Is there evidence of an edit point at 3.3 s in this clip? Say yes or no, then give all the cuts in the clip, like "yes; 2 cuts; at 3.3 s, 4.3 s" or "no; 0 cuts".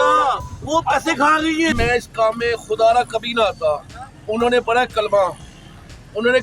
no; 1 cut; at 1.7 s